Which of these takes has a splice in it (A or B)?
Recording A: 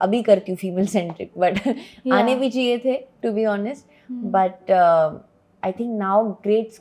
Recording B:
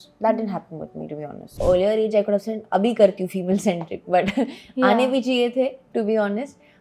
B